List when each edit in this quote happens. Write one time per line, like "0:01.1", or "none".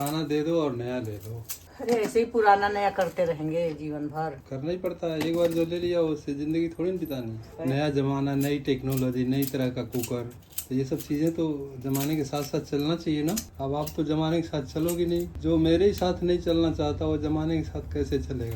0:04.4
0:07.5
0:15.3